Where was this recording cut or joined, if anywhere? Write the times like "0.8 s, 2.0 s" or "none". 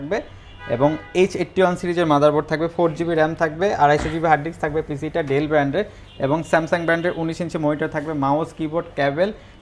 none